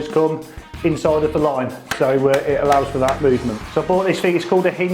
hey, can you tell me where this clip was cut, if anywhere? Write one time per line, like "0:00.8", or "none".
0:03.6

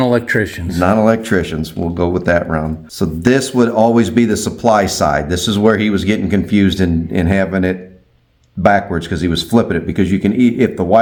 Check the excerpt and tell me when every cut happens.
none

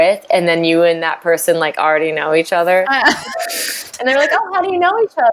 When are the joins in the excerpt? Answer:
0:03.9

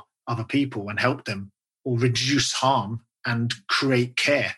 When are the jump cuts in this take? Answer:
0:01.6

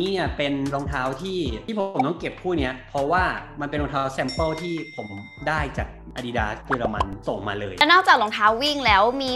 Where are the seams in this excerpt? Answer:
0:01.6
0:07.8

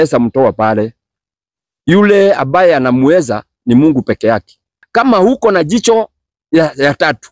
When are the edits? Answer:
0:04.8

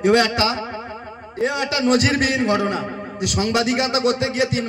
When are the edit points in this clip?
none

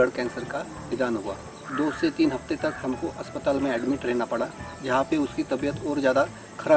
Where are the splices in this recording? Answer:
0:01.6
0:04.8

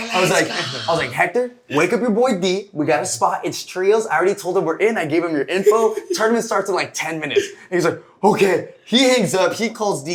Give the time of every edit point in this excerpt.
none

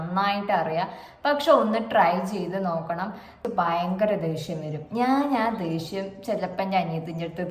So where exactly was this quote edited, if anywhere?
0:03.4

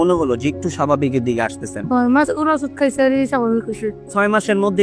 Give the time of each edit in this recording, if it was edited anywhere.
0:01.8
0:04.0

